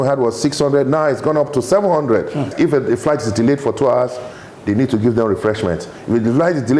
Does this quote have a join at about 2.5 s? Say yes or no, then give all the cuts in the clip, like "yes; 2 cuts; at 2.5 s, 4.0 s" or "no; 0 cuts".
yes; 1 cut; at 2.5 s